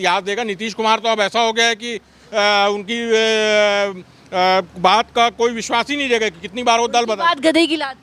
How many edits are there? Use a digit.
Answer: 0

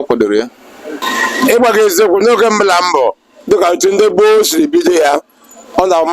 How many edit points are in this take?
1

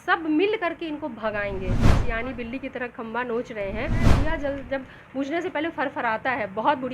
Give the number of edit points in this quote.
2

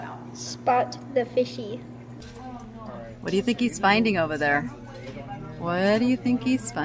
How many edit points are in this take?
1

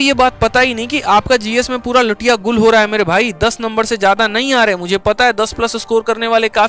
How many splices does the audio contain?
0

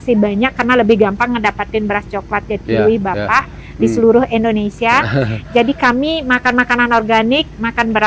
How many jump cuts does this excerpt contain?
0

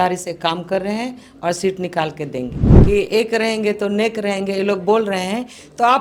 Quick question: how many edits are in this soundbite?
1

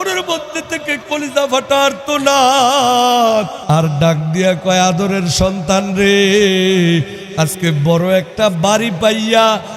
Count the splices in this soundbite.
1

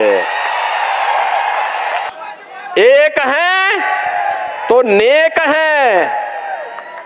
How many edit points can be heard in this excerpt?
1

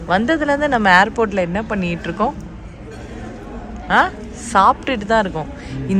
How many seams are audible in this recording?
0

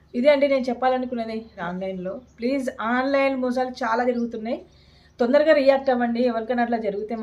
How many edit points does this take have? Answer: 1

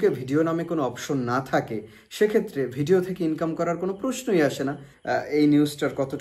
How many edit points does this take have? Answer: 1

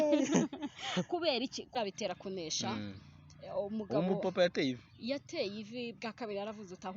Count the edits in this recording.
1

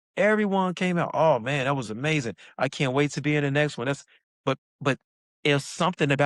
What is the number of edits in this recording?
1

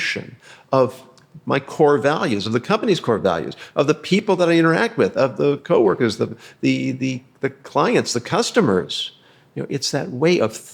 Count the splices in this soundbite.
0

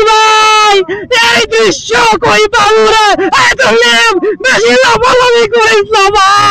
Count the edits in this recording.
0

